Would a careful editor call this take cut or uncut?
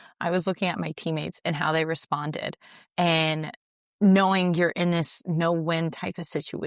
uncut